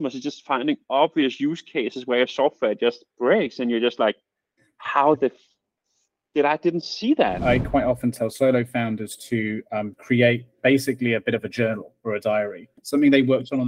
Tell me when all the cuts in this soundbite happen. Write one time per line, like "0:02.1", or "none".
0:07.4
0:12.7